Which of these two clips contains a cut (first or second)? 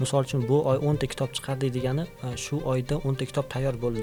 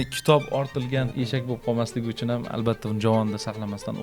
second